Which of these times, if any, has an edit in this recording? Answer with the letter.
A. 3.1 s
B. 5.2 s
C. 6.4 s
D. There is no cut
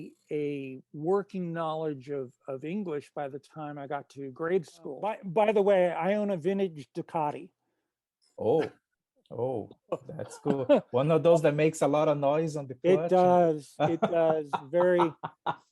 B